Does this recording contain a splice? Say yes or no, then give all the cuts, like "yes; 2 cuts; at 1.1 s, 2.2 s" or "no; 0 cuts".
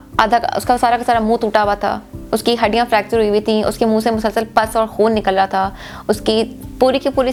no; 0 cuts